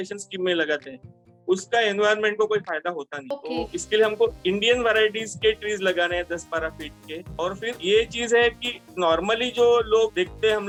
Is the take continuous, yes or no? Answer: yes